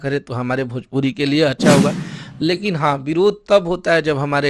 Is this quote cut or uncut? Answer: cut